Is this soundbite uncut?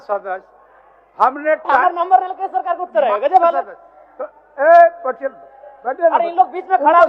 yes; 0 cuts

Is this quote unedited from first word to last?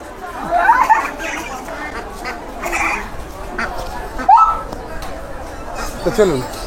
yes; 0 cuts

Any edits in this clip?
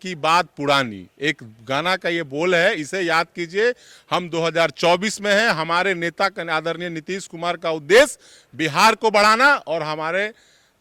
no; 0 cuts

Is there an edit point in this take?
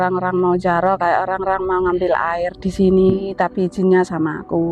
no; 0 cuts

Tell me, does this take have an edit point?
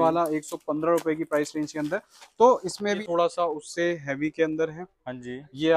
yes; 1 cut; at 3.0 s

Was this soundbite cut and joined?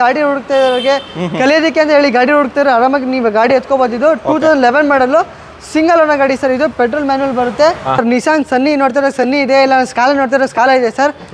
yes; 1 cut; at 7.9 s

